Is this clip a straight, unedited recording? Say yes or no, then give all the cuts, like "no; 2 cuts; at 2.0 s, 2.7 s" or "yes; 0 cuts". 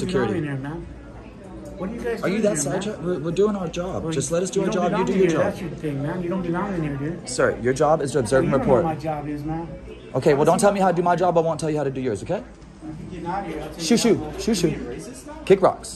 yes; 0 cuts